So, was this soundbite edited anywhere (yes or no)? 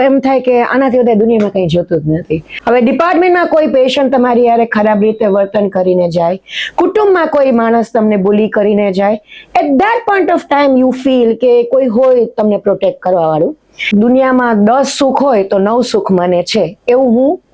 yes